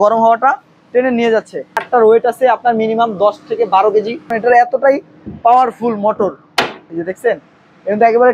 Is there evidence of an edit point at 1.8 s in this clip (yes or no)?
yes